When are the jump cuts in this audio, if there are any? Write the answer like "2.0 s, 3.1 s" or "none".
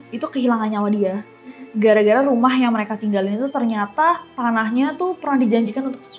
none